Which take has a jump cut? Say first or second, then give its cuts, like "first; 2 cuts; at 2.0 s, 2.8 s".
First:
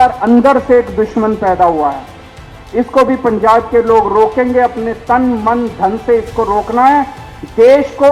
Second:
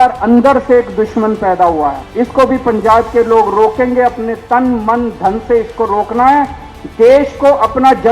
second; 1 cut; at 2.0 s